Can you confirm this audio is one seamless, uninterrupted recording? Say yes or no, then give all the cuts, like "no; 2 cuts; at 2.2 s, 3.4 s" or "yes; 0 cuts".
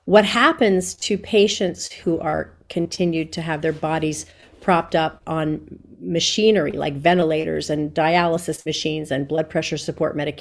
no; 1 cut; at 1.9 s